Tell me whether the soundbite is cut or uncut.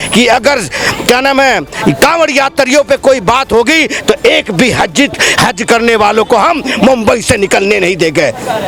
uncut